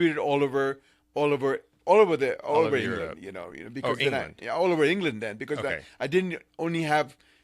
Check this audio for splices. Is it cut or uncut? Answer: uncut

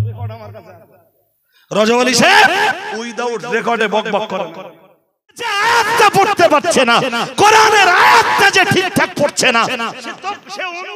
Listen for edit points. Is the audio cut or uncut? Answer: cut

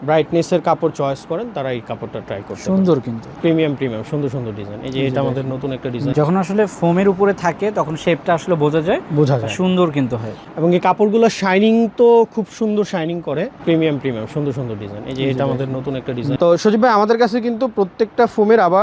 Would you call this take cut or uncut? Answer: cut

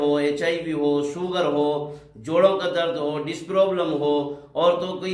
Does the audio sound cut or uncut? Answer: uncut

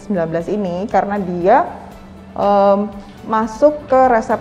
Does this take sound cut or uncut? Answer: uncut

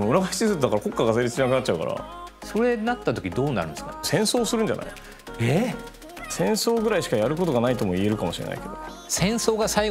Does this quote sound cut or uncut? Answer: cut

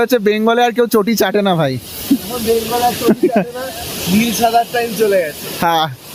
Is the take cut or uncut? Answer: uncut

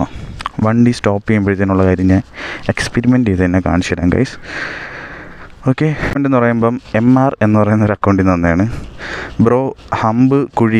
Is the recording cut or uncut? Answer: cut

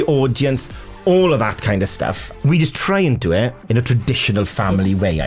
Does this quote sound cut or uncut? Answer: cut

